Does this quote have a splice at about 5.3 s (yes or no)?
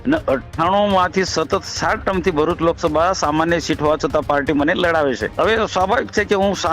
yes